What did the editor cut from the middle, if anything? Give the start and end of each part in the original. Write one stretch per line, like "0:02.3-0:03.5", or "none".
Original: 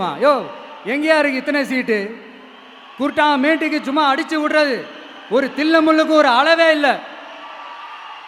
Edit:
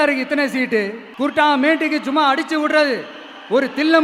0:02.2-0:02.8